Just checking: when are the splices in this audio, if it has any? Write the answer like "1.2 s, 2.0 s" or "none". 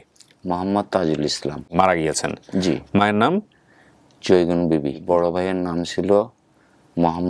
1.7 s, 5.0 s